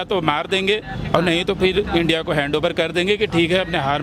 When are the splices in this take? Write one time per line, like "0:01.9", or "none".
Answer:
none

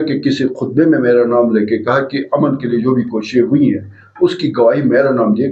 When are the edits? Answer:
none

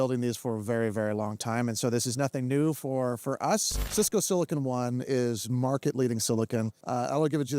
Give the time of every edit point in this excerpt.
0:03.8

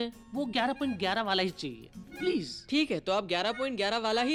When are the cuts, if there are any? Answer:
none

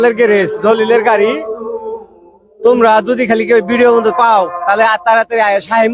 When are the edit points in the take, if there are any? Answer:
none

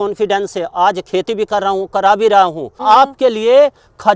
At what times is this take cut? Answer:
0:02.8

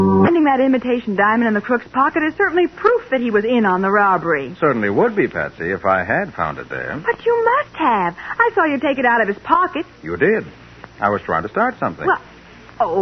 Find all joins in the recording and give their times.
0:08.8

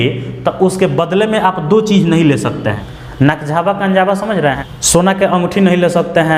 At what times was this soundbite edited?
0:02.8
0:04.6

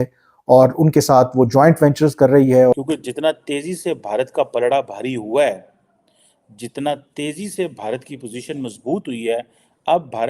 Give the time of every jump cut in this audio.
0:02.8

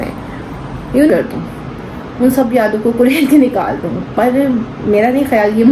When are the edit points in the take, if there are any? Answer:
0:01.1

